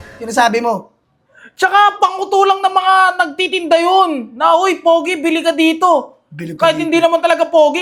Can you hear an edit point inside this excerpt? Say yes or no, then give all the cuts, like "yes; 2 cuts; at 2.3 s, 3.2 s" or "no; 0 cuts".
no; 0 cuts